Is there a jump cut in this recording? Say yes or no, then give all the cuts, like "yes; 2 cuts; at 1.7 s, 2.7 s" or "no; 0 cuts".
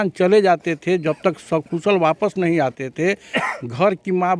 no; 0 cuts